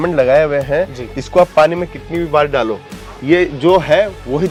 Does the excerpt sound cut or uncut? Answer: uncut